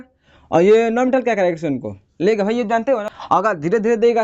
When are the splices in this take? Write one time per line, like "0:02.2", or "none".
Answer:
0:03.1